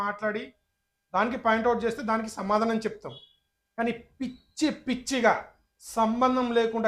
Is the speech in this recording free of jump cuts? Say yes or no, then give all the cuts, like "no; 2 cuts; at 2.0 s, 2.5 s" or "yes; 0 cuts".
yes; 0 cuts